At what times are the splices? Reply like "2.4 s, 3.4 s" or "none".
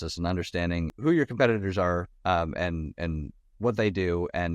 0.9 s